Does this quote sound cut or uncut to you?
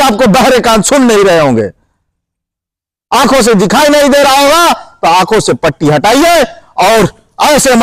uncut